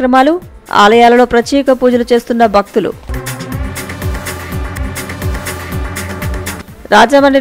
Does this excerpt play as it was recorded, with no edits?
yes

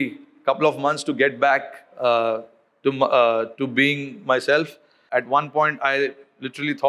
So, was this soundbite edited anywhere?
yes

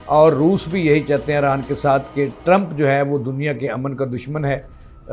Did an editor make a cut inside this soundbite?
no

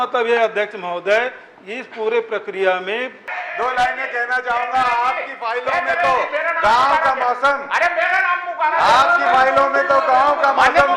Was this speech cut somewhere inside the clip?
yes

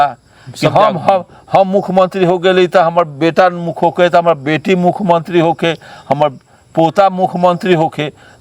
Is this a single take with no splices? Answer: yes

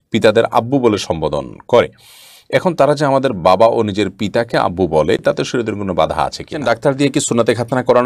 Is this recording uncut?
no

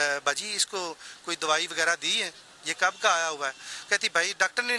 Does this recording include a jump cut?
no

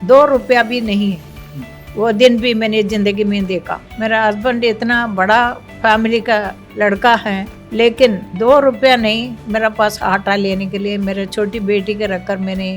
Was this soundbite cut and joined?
yes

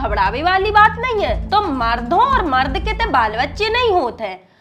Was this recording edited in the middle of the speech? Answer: no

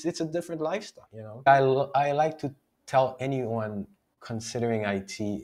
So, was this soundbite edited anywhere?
yes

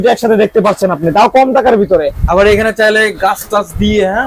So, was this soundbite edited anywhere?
no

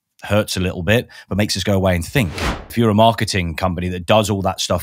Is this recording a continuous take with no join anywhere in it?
no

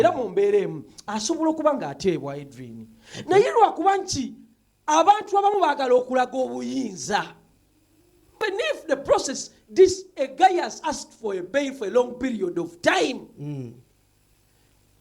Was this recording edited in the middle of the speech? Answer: yes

